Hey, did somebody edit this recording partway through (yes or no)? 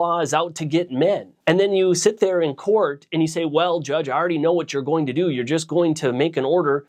no